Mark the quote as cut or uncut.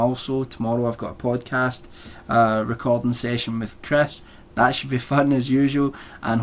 uncut